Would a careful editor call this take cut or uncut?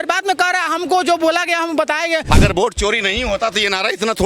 cut